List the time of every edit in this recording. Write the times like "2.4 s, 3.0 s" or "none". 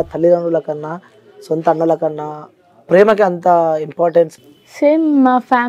4.4 s